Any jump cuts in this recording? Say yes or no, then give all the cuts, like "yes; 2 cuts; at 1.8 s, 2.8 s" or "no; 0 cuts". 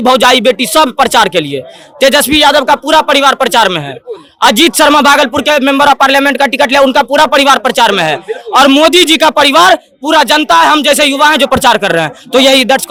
no; 0 cuts